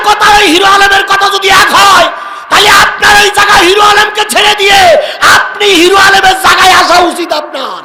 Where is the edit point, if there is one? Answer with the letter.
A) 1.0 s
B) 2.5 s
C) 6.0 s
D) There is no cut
D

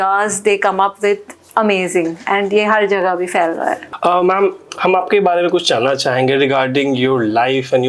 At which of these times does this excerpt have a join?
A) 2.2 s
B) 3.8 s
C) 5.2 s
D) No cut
B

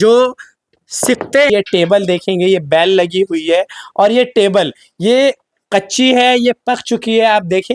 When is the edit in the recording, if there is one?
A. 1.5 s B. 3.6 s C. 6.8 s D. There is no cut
A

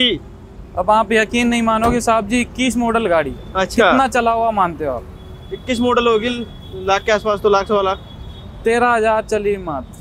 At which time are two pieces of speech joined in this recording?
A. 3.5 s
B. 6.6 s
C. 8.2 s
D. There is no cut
D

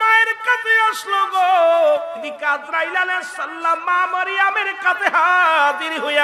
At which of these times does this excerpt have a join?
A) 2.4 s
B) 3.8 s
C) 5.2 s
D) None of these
A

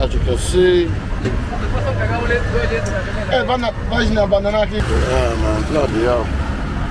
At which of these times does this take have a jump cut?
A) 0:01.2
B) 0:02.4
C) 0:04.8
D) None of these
C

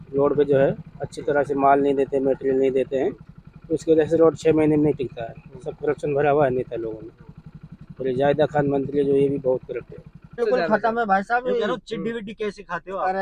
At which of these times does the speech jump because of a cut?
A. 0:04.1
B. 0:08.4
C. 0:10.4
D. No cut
C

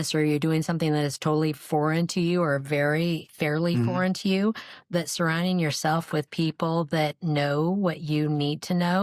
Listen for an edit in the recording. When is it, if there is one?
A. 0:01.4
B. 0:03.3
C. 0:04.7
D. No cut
B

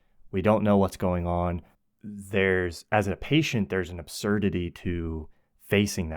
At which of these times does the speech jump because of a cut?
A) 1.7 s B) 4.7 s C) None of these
A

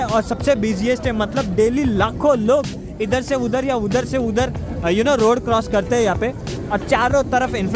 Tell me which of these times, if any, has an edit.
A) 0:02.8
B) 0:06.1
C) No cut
C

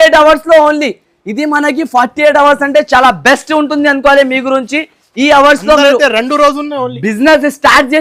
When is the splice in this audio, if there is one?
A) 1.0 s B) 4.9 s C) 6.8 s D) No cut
D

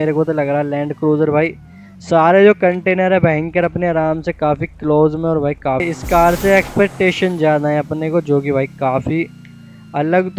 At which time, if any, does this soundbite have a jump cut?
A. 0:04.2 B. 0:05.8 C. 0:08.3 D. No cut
B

